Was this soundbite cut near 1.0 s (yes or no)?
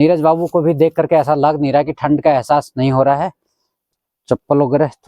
no